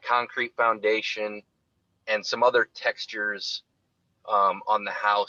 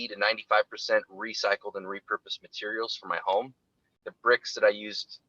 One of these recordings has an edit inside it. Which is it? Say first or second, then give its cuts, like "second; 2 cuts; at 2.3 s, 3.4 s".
second; 1 cut; at 4.1 s